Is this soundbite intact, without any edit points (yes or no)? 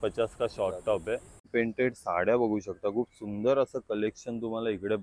no